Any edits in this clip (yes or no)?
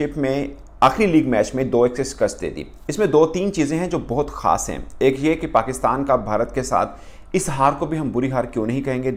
no